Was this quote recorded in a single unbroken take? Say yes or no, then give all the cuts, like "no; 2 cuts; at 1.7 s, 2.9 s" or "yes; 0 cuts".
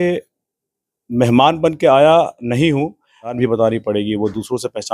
no; 1 cut; at 3.4 s